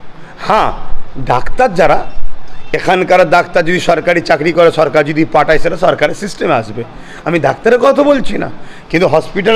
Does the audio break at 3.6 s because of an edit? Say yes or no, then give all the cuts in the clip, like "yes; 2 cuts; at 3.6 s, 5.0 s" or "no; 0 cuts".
no; 0 cuts